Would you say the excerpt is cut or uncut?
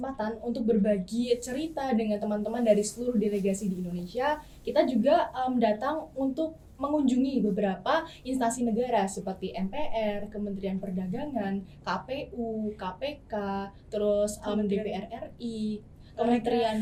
uncut